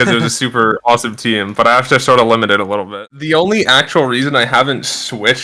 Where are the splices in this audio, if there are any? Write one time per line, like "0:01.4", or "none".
0:02.8